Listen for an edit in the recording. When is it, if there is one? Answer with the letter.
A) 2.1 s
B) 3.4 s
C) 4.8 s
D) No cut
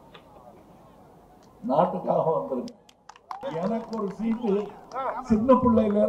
B